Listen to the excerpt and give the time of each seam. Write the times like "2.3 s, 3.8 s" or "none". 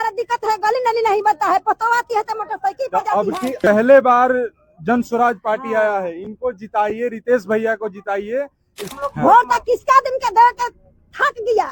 3.6 s, 8.9 s